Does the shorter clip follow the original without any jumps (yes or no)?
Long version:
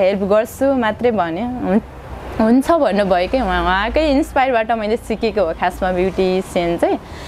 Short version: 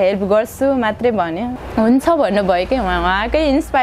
no